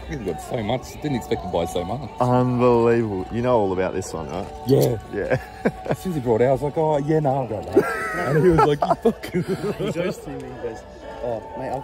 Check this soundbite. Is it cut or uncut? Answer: uncut